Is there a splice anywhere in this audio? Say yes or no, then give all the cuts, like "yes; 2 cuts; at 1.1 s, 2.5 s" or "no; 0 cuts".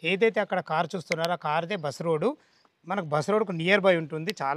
no; 0 cuts